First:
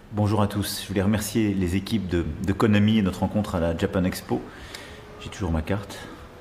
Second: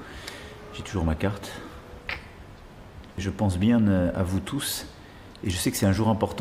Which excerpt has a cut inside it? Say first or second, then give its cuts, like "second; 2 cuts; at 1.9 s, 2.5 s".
second; 1 cut; at 3.2 s